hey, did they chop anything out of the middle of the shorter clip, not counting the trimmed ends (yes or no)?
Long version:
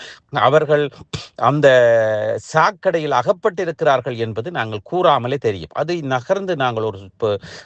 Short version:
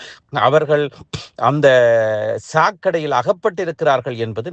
no